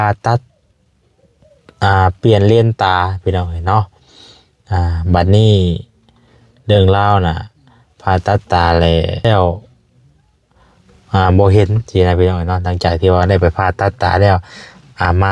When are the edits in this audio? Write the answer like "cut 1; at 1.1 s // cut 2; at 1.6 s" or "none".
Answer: cut 1; at 9.2 s